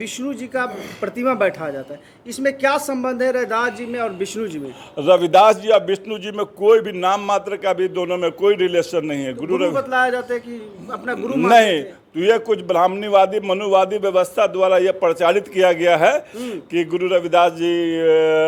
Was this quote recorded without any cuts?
yes; 0 cuts

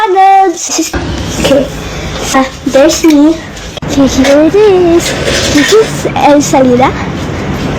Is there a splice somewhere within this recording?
yes; 1 cut; at 0.9 s

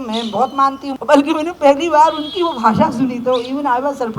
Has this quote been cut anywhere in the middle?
yes; 1 cut; at 0.9 s

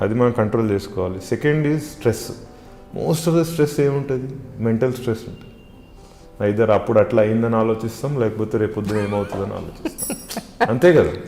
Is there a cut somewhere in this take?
no; 0 cuts

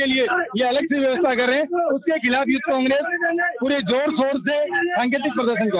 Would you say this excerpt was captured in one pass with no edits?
yes; 0 cuts

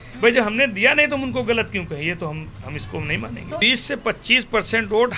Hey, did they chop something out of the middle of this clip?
yes; 1 cut; at 3.6 s

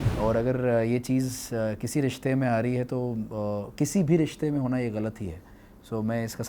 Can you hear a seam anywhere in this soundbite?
no; 0 cuts

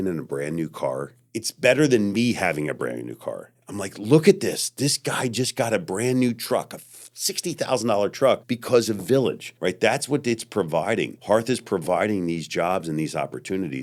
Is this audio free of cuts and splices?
yes; 0 cuts

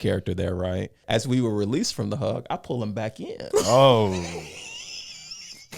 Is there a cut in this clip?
yes; 1 cut; at 0.9 s

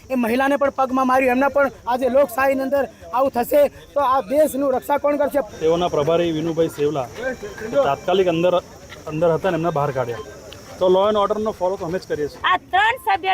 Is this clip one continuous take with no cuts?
no; 3 cuts; at 1.8 s, 5.5 s, 12.4 s

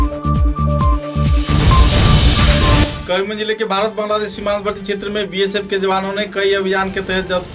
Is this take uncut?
yes; 0 cuts

